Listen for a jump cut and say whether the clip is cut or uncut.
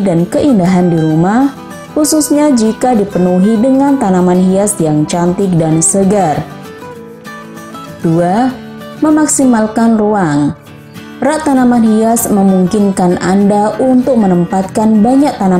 uncut